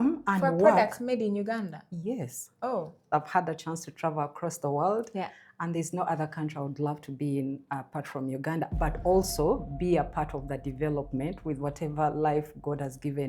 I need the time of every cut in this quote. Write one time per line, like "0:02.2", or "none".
0:03.0